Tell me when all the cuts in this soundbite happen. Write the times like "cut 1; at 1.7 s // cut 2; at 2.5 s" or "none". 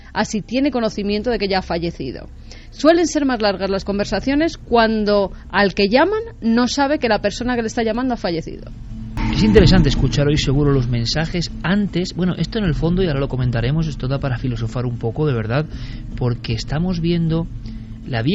none